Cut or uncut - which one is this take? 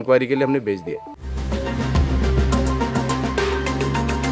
cut